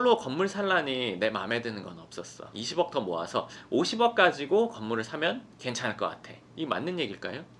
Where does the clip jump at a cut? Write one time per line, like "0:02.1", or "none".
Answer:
0:02.4